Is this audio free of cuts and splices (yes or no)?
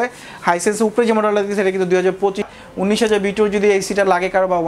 no